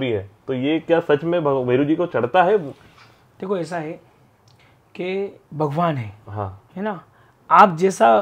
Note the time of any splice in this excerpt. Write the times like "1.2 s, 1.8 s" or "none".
5.4 s, 6.6 s